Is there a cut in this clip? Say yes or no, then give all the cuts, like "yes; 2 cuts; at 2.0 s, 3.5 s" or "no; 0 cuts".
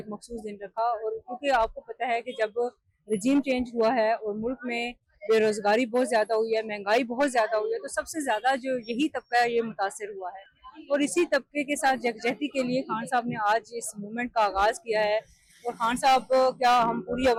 no; 0 cuts